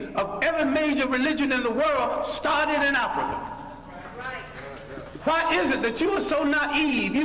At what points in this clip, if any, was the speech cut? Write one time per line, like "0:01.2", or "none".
0:01.5